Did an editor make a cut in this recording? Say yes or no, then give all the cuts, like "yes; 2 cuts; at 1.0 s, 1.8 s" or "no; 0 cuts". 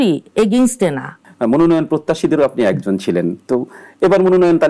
yes; 1 cut; at 1.1 s